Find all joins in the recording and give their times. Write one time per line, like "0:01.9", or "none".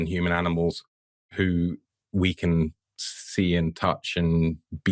none